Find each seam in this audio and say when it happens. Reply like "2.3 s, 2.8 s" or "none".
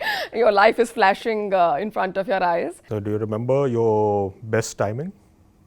2.8 s